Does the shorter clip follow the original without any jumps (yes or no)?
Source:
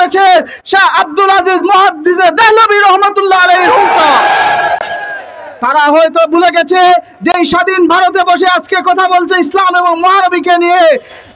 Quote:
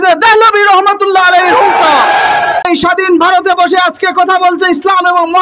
no